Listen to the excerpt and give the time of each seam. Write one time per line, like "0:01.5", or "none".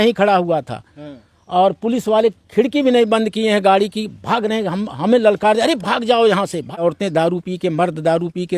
0:06.7